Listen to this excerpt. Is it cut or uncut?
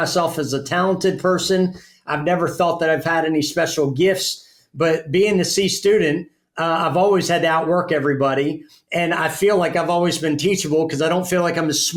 uncut